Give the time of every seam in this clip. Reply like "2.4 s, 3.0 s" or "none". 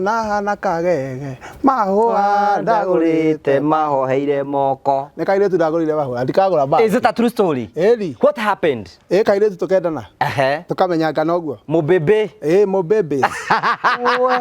none